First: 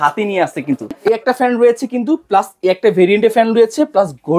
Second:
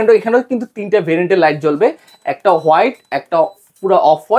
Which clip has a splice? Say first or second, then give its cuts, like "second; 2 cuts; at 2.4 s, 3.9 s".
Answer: first; 1 cut; at 0.9 s